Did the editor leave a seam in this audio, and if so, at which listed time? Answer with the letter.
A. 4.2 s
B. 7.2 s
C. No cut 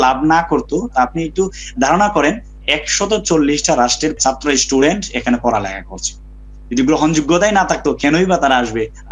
A